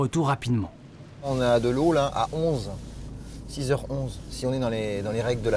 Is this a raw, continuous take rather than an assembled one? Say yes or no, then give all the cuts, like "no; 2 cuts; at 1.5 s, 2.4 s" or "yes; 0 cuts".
yes; 0 cuts